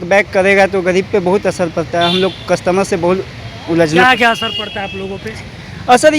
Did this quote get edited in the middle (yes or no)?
no